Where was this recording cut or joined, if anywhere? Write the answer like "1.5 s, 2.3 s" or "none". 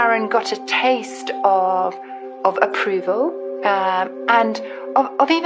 none